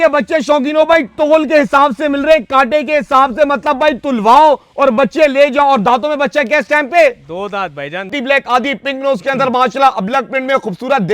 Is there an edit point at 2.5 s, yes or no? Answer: no